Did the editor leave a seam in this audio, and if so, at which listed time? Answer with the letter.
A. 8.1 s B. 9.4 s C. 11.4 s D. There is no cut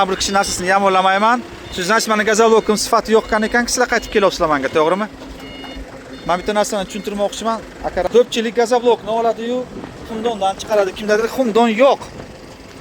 A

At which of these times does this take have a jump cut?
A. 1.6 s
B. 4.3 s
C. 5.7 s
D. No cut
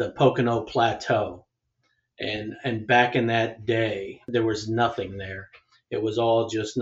B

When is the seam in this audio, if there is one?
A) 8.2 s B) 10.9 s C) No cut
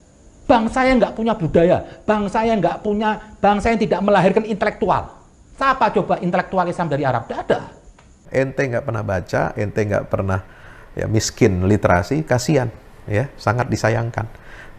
A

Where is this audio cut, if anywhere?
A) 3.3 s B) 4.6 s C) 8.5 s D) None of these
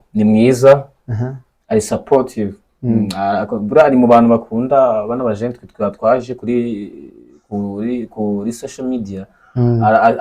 D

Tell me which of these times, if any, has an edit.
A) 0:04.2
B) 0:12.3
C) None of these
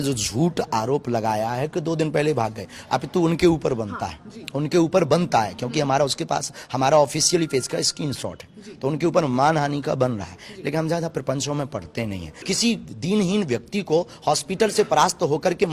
B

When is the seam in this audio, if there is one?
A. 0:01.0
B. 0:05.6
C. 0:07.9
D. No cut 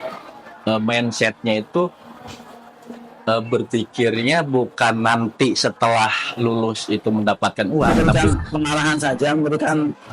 C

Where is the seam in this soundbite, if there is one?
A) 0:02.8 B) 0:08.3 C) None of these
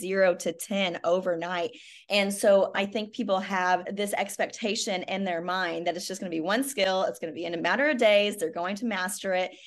A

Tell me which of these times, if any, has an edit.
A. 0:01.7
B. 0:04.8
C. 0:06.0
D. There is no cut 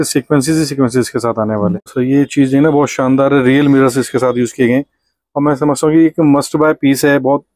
A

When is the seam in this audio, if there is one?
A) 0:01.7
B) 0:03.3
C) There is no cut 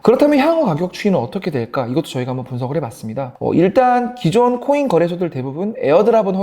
B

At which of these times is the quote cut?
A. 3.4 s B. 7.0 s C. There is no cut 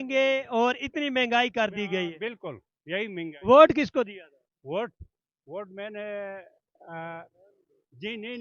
C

